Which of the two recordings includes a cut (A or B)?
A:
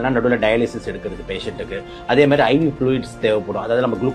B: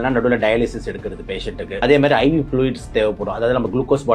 B